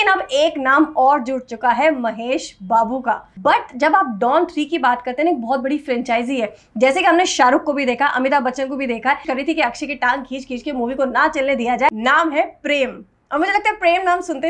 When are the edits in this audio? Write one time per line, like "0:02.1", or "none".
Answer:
0:03.3
0:09.3
0:11.9